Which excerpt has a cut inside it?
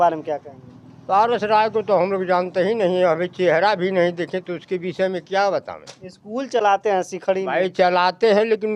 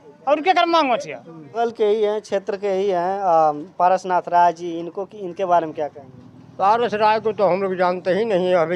second; 1 cut; at 1.6 s

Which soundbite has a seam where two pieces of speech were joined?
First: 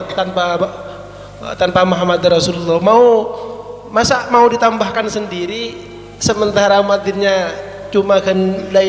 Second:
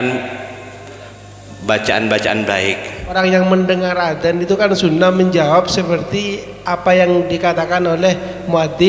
second; 1 cut; at 3.1 s

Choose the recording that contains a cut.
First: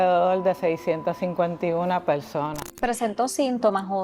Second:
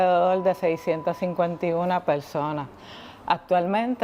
first; 1 cut; at 2.7 s

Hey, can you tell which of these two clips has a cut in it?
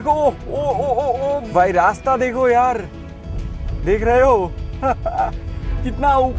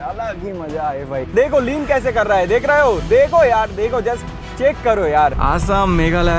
second; 2 cuts; at 1.3 s, 5.4 s

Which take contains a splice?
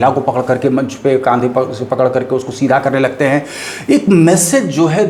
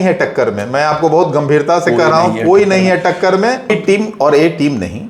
second; 1 cut; at 3.7 s

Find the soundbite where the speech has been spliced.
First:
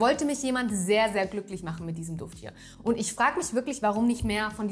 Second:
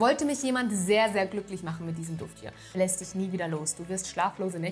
second; 1 cut; at 2.8 s

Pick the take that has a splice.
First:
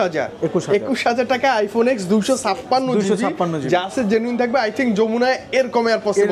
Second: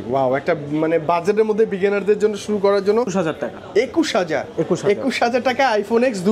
second; 1 cut; at 3.1 s

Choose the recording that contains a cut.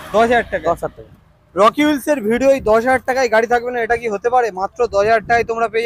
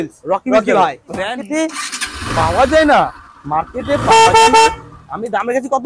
second; 1 cut; at 1.3 s

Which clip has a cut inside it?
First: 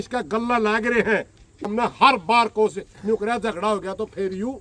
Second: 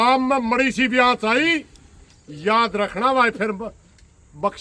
first; 1 cut; at 1.7 s

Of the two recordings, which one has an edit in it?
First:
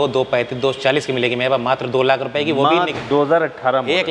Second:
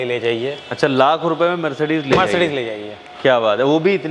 first; 1 cut; at 3.0 s

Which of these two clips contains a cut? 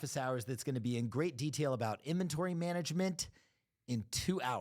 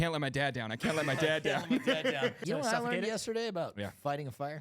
second; 1 cut; at 2.4 s

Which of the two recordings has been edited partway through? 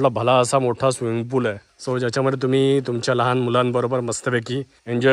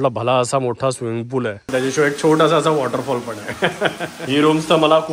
second; 2 cuts; at 1.7 s, 4.1 s

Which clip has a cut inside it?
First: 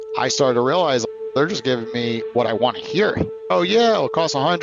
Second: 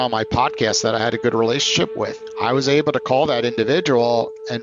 first; 1 cut; at 2.2 s

